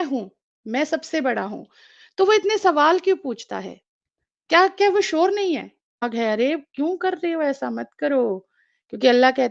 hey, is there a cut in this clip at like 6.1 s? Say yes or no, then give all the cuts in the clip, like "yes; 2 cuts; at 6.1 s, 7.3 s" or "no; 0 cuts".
yes; 1 cut; at 6.1 s